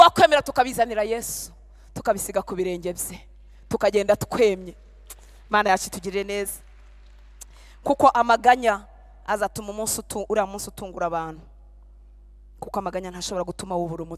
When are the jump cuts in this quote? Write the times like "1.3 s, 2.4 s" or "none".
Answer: none